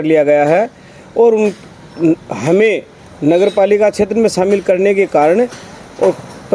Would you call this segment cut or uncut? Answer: uncut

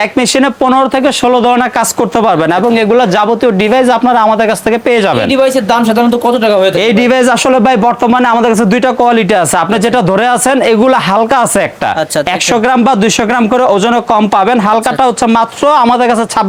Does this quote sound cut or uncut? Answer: uncut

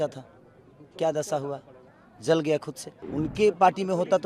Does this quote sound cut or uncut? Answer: cut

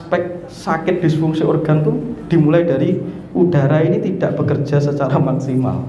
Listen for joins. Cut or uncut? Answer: uncut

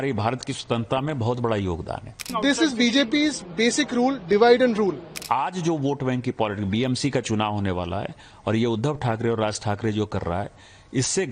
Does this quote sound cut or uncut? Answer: cut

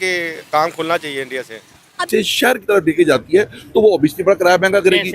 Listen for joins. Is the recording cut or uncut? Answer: cut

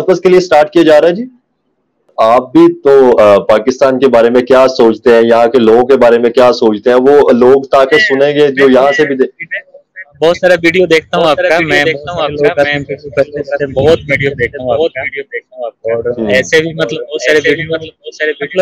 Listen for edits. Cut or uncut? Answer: cut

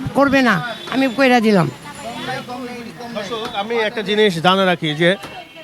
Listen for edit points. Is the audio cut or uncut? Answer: uncut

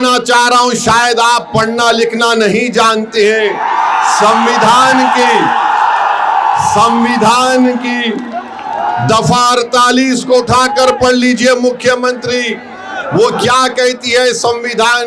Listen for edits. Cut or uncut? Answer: uncut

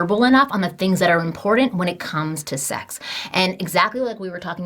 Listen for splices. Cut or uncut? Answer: uncut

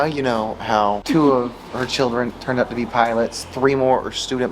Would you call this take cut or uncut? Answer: cut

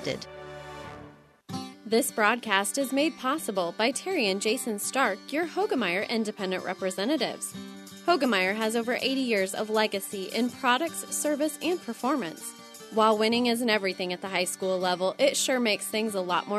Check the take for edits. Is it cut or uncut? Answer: cut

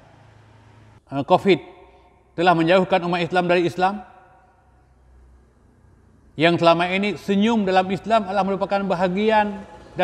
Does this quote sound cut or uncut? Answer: cut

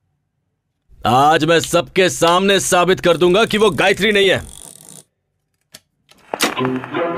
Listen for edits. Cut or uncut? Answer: uncut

